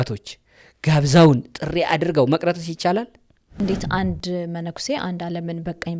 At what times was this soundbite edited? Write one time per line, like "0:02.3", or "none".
0:03.6